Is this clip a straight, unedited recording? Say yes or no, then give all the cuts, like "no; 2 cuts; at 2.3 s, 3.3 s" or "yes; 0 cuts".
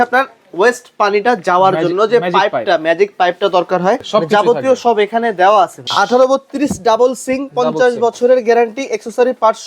no; 2 cuts; at 4.0 s, 5.9 s